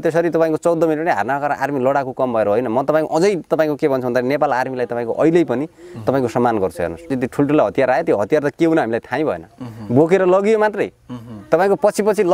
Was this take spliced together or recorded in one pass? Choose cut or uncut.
cut